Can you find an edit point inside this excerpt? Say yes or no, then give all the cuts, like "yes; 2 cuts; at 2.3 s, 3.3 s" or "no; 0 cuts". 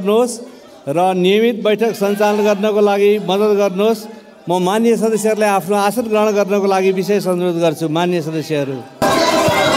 no; 0 cuts